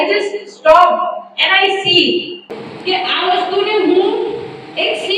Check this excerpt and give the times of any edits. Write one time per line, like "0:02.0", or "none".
0:02.6